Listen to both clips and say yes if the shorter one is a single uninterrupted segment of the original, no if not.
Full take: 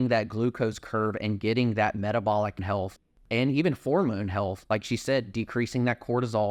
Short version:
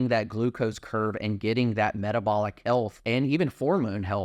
no